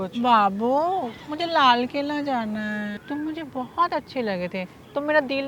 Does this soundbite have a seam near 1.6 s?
no; 1 cut; at 3.0 s

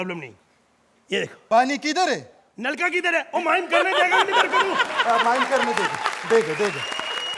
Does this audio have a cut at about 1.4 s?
yes; 1 cut; at 1.4 s

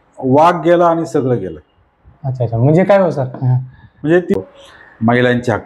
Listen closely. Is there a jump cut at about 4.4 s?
yes; 1 cut; at 4.4 s

